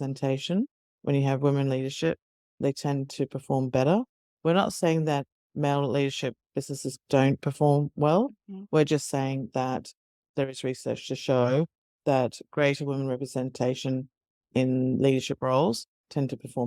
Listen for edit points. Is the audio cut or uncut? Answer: uncut